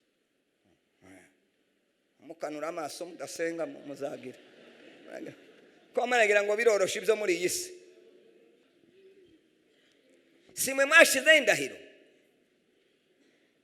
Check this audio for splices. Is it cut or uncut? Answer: cut